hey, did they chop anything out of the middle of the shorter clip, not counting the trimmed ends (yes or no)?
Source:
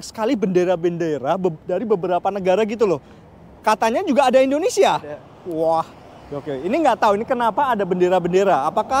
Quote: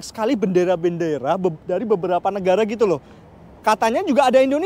no